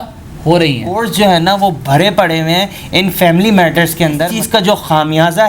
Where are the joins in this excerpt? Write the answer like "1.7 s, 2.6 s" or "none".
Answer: 1.4 s, 4.3 s